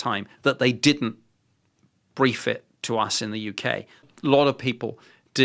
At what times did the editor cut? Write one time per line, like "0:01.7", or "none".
0:04.1